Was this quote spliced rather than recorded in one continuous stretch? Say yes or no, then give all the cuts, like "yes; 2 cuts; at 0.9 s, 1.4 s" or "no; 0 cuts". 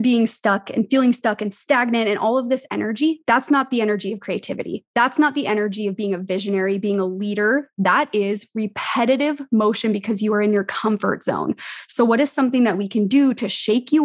no; 0 cuts